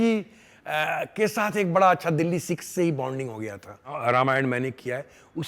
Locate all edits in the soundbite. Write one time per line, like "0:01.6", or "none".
0:04.0

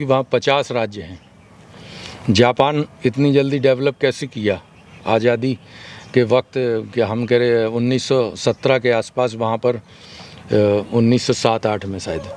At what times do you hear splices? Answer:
none

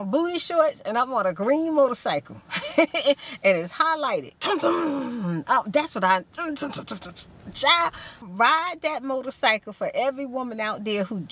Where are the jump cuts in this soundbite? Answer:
0:04.3
0:08.2

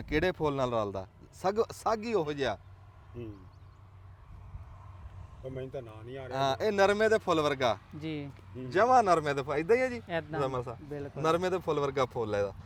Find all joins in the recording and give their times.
none

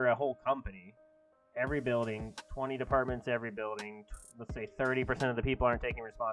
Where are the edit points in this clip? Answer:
none

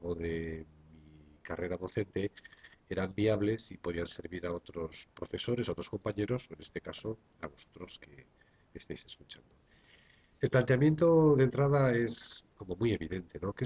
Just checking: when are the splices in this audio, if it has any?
none

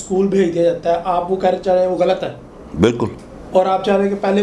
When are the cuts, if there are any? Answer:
none

